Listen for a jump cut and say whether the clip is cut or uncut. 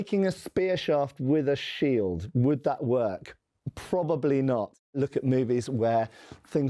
uncut